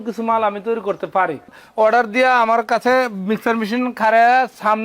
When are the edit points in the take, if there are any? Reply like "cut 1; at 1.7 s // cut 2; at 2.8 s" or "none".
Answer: cut 1; at 1.5 s